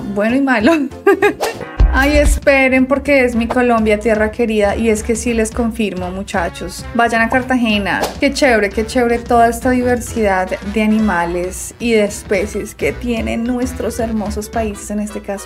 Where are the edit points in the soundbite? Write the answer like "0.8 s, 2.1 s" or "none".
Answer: 1.5 s, 8.1 s